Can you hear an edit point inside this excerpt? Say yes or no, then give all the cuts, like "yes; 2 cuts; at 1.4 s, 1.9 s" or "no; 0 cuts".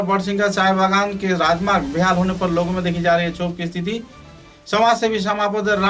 no; 0 cuts